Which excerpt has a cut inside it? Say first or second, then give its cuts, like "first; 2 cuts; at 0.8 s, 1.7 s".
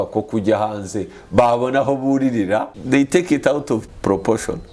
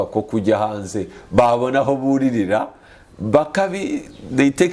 first; 2 cuts; at 2.7 s, 3.9 s